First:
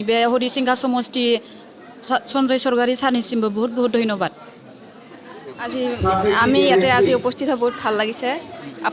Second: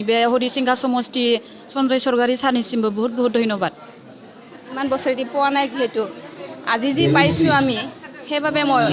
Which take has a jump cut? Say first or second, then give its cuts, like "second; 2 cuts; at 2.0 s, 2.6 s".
second; 2 cuts; at 1.7 s, 4.8 s